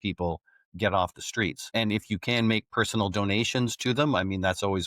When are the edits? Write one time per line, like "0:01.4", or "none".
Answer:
0:01.7